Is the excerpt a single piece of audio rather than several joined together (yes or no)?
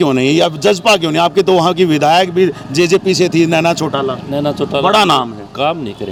yes